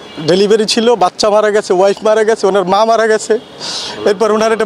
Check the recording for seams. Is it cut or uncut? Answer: uncut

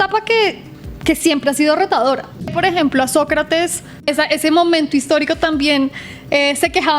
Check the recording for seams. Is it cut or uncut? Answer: cut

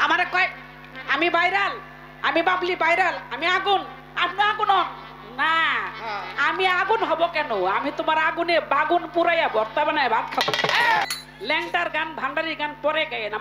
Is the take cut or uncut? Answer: cut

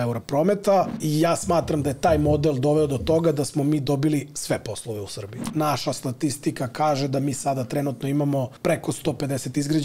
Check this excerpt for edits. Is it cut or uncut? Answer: cut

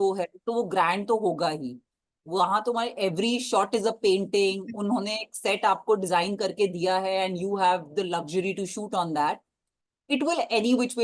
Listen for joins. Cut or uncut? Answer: uncut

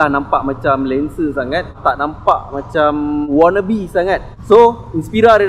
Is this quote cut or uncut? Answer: cut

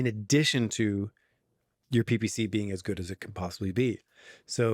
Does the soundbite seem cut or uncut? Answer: uncut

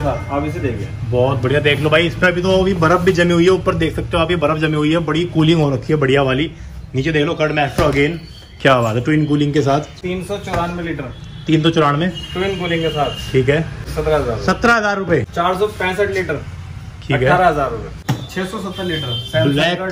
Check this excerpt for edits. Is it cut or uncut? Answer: cut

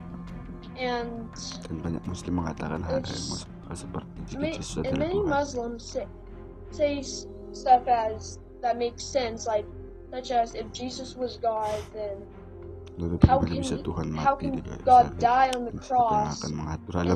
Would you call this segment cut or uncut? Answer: uncut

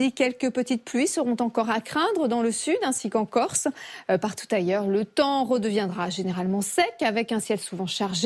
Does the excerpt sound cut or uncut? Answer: cut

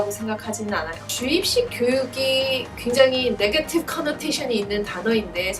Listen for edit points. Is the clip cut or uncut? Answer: cut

